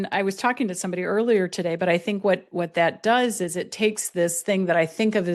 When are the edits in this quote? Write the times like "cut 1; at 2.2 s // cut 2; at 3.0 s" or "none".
none